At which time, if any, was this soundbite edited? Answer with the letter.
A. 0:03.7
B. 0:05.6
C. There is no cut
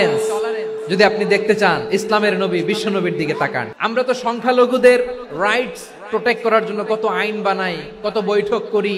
A